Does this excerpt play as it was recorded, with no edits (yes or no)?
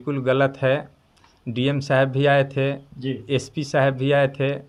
yes